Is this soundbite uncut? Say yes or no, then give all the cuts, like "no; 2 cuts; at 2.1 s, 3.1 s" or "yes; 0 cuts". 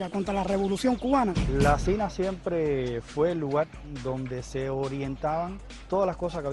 no; 2 cuts; at 3.3 s, 3.4 s